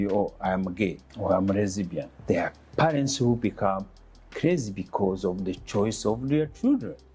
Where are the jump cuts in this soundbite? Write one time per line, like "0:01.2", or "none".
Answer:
0:01.1
0:02.1